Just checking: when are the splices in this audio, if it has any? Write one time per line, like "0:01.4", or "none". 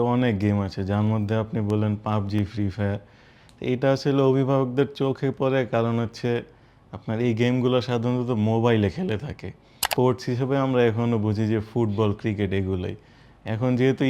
0:09.9